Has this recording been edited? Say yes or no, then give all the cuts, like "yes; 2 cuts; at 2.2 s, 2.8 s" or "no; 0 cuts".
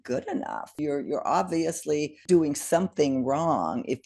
yes; 2 cuts; at 0.8 s, 2.2 s